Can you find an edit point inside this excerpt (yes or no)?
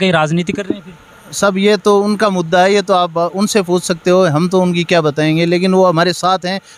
no